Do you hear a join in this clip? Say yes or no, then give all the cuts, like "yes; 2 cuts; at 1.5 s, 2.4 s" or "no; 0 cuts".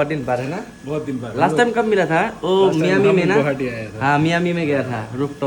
no; 0 cuts